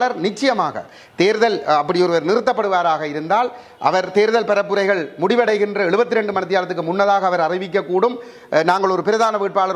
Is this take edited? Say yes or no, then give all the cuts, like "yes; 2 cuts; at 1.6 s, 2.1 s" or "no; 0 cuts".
no; 0 cuts